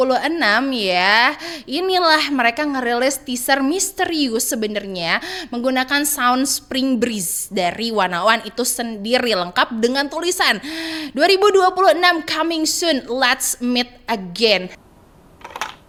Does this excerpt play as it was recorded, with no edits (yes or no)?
yes